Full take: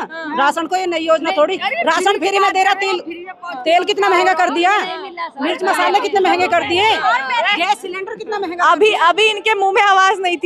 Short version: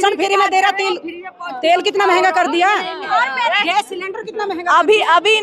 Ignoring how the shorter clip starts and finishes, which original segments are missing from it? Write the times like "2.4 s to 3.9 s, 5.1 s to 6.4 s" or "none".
5.1 s to 7.0 s